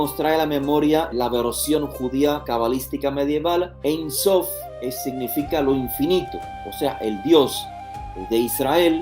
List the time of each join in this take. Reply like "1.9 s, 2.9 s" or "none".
1.1 s, 2.4 s, 3.7 s